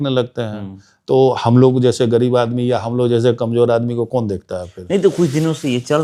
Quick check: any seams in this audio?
no; 0 cuts

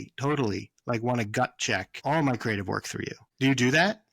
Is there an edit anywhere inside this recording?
yes; 2 cuts; at 1.9 s, 3.2 s

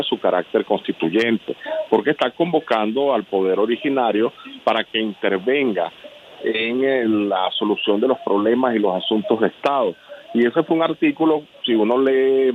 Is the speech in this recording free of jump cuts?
yes; 0 cuts

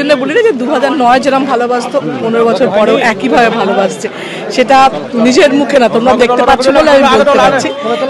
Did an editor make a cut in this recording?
no; 0 cuts

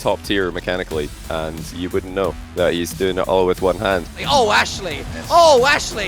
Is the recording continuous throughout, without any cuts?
no; 1 cut; at 4.0 s

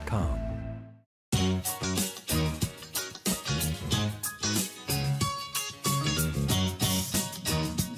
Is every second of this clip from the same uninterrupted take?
no; 1 cut; at 1.1 s

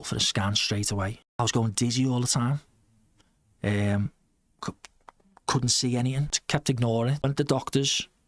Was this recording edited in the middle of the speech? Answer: yes; 3 cuts; at 1.4 s, 6.4 s, 7.2 s

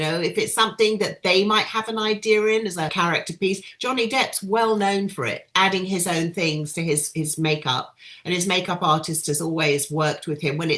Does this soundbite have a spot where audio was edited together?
yes; 1 cut; at 2.9 s

